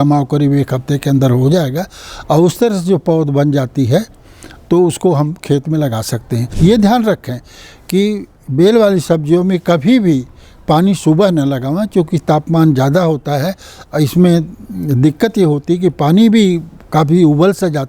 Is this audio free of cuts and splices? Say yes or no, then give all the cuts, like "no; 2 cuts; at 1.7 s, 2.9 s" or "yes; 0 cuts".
no; 1 cut; at 6.4 s